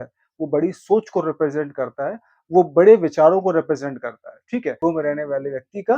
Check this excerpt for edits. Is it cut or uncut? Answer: cut